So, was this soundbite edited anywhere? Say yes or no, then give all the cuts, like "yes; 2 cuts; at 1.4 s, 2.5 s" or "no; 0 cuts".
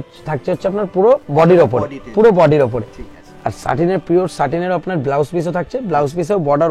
no; 0 cuts